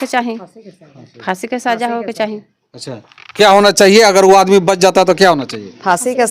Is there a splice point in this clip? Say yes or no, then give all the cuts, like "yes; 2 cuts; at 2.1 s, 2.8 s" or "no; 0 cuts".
no; 0 cuts